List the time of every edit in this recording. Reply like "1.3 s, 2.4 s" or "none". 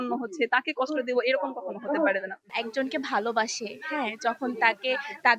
2.5 s